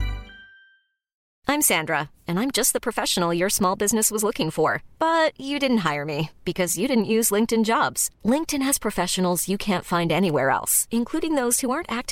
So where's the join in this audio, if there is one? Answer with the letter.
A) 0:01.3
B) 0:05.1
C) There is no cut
A